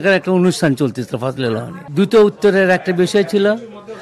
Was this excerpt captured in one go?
no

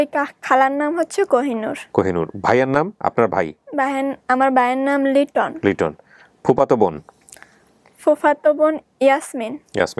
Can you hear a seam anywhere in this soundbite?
no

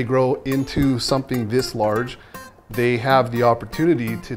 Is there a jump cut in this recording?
no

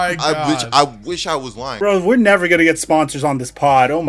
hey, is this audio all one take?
no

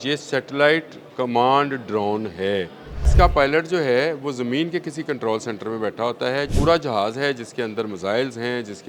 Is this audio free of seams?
no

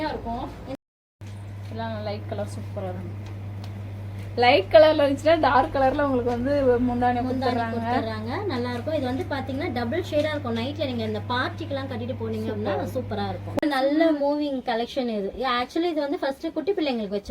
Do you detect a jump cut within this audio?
yes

